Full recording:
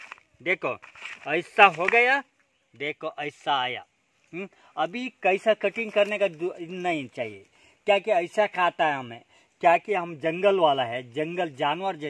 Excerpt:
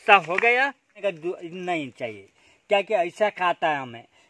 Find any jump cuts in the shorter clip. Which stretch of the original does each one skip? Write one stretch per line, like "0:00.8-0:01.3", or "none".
0:02.5-0:06.2